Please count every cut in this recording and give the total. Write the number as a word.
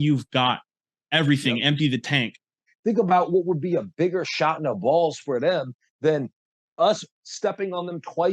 one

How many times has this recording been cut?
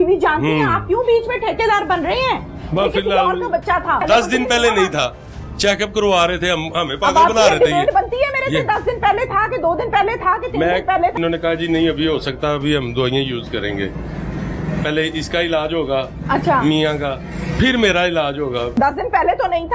three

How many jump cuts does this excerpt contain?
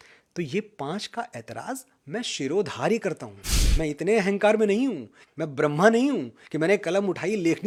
zero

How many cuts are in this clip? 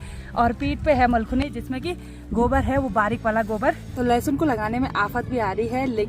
one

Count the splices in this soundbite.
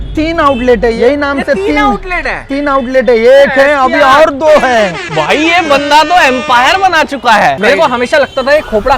one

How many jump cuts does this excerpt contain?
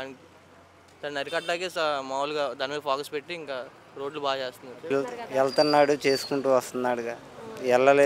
one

